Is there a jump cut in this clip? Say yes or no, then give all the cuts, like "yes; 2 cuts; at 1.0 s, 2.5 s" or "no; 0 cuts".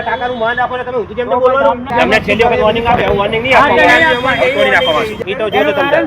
yes; 2 cuts; at 1.9 s, 5.2 s